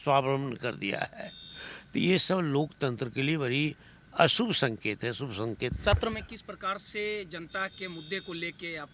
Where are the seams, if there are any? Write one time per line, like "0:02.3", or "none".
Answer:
none